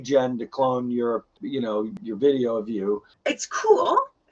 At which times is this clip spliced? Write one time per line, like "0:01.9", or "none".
0:01.9
0:03.1